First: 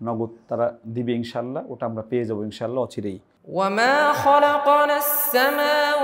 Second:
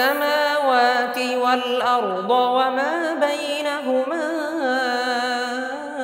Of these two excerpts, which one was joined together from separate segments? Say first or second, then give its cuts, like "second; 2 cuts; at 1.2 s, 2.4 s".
first; 1 cut; at 3.3 s